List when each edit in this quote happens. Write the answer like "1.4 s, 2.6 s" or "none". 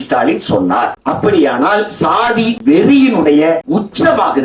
1.0 s, 2.6 s, 3.6 s